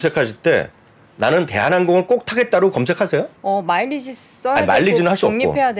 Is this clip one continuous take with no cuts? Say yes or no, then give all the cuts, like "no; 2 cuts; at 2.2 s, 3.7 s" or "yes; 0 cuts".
no; 1 cut; at 3.3 s